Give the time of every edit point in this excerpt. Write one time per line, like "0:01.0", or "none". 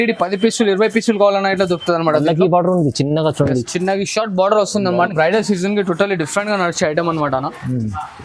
0:05.1